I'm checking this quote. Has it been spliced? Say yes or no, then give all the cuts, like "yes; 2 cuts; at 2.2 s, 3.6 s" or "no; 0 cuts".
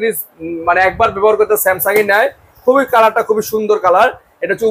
no; 0 cuts